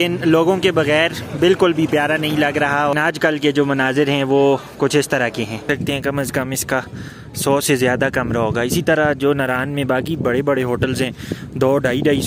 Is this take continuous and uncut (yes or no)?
no